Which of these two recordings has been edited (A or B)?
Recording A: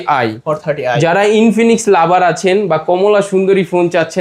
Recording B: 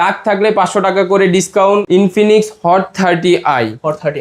B